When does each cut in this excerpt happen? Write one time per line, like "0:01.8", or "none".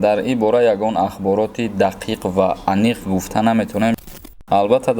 0:04.0